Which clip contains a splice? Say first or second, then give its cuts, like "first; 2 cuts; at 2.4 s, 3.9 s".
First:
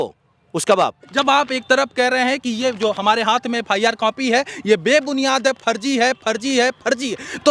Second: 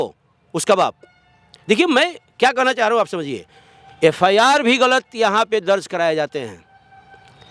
first; 1 cut; at 1.0 s